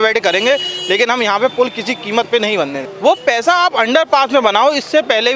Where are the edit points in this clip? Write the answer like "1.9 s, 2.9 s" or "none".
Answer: none